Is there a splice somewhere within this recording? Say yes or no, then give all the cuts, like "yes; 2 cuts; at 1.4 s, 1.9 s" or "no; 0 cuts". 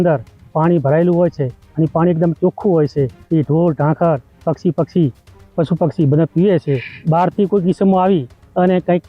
yes; 2 cuts; at 3.2 s, 6.9 s